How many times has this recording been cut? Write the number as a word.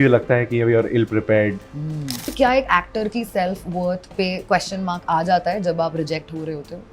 one